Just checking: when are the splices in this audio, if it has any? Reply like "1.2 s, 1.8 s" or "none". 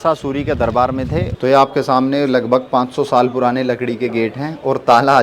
1.3 s